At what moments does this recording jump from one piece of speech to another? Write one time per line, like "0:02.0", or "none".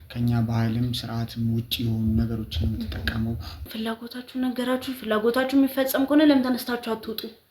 0:03.7